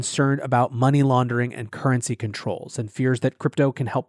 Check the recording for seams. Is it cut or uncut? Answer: uncut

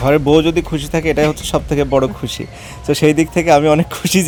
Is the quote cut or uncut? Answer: uncut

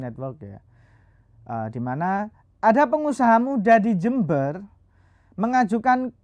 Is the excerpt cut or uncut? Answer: uncut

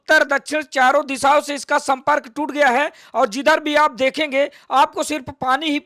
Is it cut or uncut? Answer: uncut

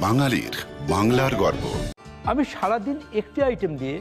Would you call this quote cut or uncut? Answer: uncut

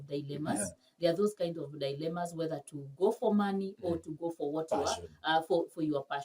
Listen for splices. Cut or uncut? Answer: uncut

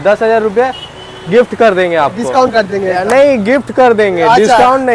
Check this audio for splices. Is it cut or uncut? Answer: uncut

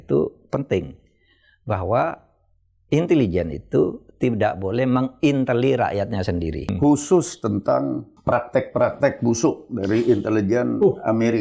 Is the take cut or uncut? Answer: cut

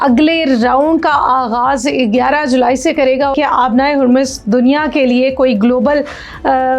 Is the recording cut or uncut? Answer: cut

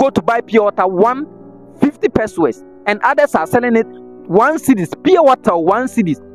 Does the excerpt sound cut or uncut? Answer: uncut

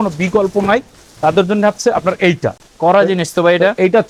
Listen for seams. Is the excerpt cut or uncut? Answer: uncut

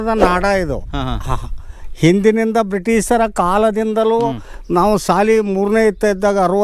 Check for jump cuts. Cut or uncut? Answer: uncut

